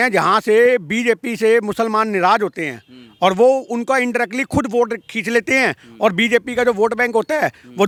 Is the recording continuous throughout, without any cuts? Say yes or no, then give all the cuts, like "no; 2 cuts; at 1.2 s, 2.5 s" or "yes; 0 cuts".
yes; 0 cuts